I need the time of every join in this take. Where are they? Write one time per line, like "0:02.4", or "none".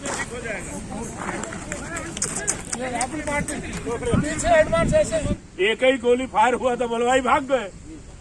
0:05.4